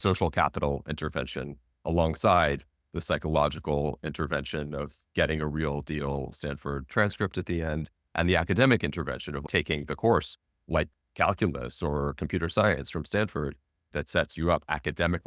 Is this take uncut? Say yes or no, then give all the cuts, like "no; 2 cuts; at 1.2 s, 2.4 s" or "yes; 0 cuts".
no; 1 cut; at 13.9 s